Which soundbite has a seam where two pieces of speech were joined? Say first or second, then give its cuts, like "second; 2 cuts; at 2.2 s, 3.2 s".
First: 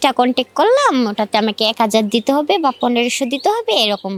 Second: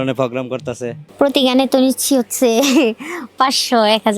second; 1 cut; at 1.0 s